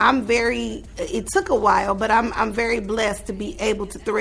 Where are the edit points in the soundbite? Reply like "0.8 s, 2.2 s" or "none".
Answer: none